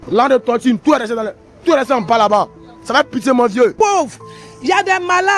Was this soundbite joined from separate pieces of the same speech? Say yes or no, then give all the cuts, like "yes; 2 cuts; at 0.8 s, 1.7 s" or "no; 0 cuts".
yes; 1 cut; at 3.7 s